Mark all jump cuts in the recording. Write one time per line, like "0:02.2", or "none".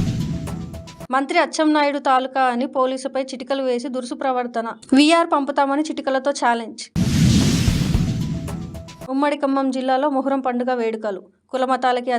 0:00.9

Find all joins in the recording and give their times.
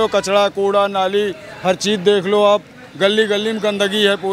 none

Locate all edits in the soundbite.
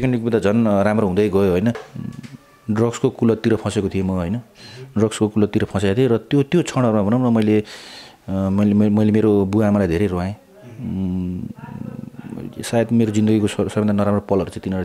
0:01.9

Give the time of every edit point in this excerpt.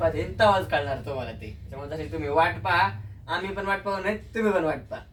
none

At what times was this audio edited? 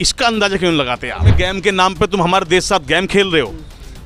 0:01.4

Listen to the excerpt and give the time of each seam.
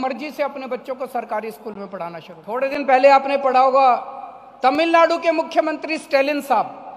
0:02.6

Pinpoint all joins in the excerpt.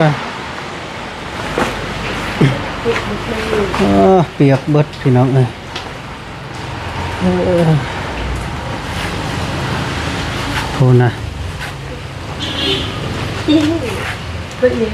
none

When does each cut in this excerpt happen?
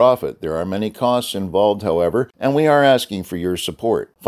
0:02.3

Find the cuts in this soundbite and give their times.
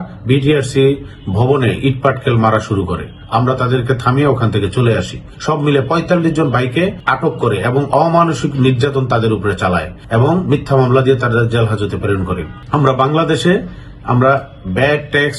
0:07.0
0:10.0
0:12.5

